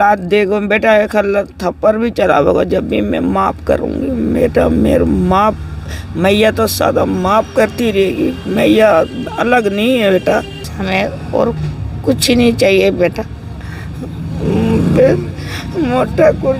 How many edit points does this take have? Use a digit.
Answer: 1